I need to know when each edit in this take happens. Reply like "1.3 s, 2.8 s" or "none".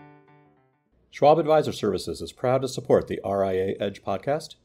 1.2 s